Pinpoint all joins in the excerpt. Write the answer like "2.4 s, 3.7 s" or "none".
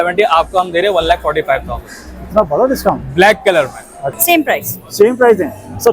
4.0 s